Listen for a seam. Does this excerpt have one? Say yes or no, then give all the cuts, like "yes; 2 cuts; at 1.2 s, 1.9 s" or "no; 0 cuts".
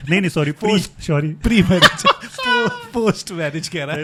no; 0 cuts